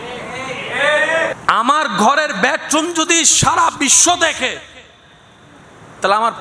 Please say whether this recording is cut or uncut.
cut